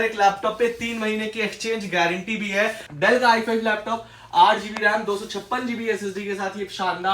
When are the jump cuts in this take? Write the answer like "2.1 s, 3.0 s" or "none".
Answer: 2.8 s